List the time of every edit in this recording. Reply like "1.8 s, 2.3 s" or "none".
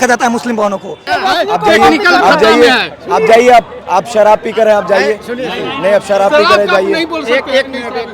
1.0 s

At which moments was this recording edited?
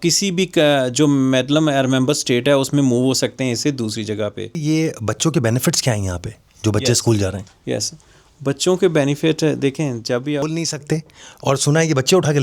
4.6 s, 10.4 s

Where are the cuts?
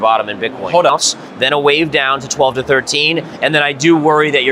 0.9 s

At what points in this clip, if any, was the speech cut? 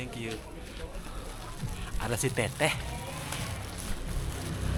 none

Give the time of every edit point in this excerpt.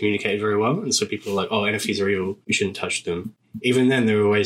2.4 s, 3.4 s

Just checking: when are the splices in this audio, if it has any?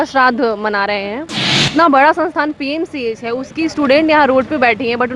1.6 s

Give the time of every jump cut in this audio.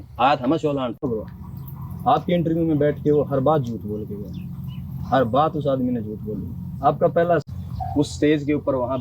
1.0 s, 7.4 s

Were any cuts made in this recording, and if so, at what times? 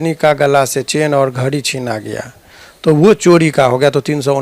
none

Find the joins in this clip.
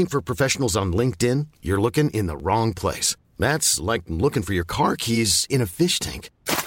none

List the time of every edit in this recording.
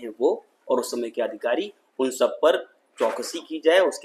none

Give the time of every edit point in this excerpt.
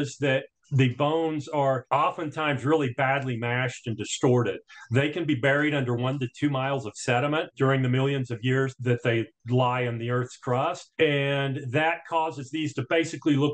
none

